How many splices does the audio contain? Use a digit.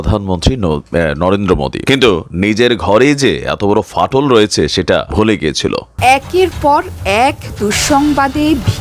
3